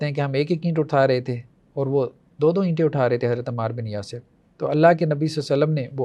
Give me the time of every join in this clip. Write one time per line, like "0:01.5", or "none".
none